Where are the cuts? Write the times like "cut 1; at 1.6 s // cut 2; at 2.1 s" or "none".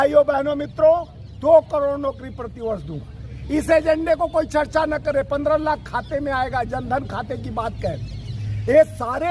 none